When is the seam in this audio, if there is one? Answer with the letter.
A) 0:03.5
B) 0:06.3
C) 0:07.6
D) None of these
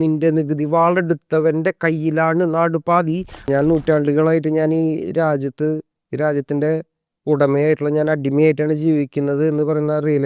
A